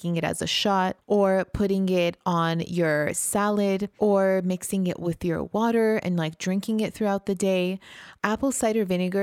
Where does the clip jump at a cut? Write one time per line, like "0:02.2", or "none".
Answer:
0:01.0
0:03.9